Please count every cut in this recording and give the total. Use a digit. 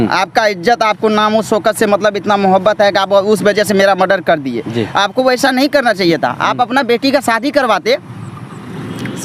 0